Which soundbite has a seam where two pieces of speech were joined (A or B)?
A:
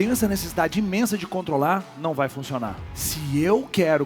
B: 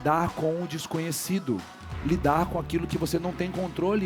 A